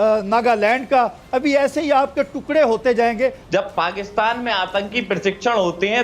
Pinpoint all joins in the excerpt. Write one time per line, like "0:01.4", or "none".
0:03.4